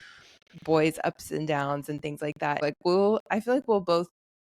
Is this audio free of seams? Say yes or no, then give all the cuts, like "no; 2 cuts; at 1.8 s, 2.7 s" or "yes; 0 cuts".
no; 1 cut; at 2.6 s